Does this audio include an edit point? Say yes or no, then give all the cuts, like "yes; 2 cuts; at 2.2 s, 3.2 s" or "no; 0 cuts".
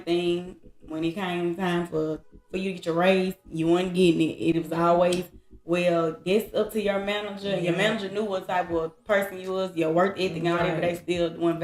no; 0 cuts